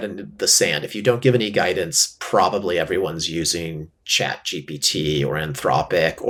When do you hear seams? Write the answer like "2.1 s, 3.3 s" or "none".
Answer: none